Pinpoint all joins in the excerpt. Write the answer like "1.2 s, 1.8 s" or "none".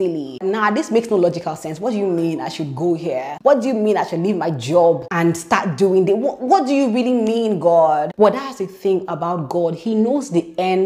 none